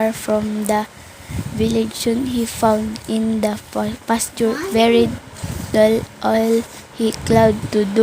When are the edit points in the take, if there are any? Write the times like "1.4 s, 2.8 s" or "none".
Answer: 6.1 s

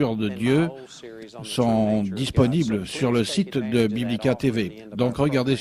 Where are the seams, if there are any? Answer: 1.9 s

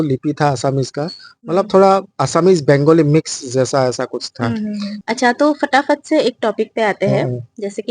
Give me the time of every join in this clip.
4.9 s

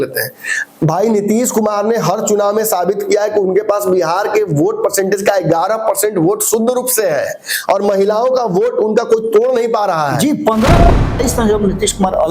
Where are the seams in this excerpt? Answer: 11.0 s

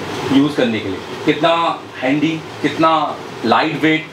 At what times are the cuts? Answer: none

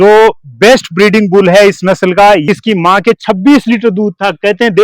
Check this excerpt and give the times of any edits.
2.4 s

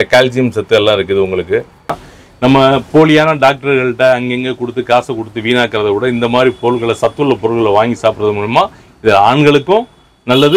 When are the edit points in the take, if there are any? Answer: 2.0 s

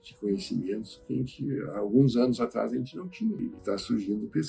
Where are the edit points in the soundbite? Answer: 3.4 s

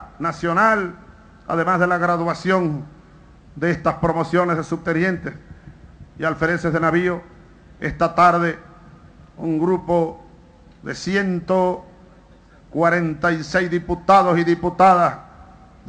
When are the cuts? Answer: 7.6 s

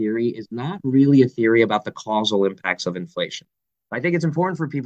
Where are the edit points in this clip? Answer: none

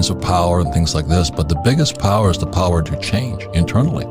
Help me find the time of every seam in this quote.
none

